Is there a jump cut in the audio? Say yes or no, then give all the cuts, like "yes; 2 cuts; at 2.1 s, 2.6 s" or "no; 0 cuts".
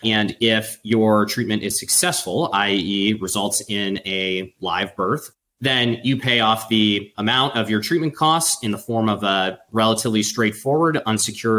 no; 0 cuts